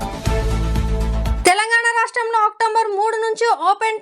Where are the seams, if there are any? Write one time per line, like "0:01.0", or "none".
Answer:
0:01.4

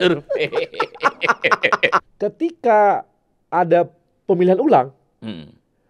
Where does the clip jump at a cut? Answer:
0:02.1

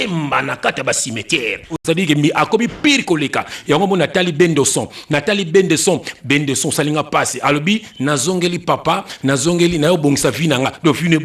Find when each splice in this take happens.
0:01.8

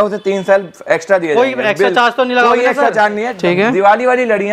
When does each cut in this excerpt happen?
0:03.3

